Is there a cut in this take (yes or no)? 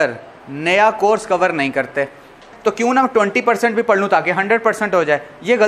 yes